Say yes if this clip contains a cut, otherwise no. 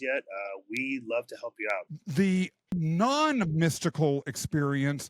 yes